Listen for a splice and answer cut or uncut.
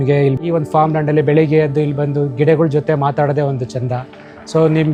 uncut